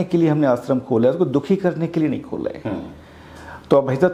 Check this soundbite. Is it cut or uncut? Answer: uncut